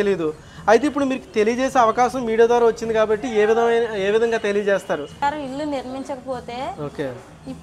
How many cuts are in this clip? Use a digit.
1